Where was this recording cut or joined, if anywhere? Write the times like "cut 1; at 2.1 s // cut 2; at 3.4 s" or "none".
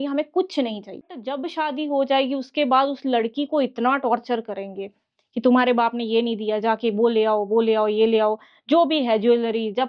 cut 1; at 1.2 s